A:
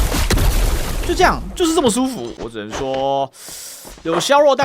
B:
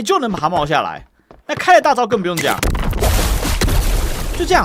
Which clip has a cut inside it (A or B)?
A